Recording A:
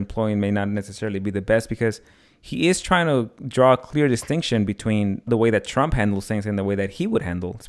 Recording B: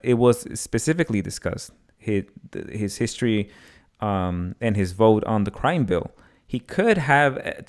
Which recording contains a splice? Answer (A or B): A